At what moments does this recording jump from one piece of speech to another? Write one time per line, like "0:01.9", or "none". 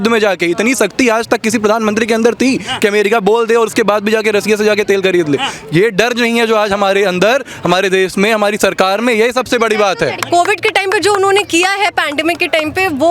0:10.2